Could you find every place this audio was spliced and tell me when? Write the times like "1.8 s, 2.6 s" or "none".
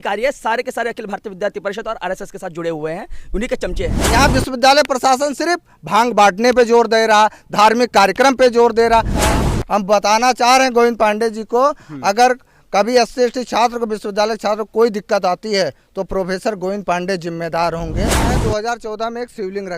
4.0 s, 9.2 s, 18.2 s